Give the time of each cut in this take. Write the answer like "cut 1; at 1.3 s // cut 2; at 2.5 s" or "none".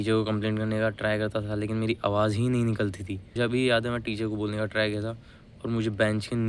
cut 1; at 3.3 s